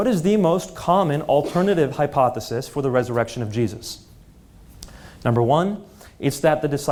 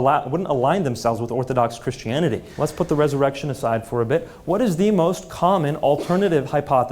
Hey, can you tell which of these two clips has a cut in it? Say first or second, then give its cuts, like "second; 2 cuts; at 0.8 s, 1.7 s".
second; 1 cut; at 2.5 s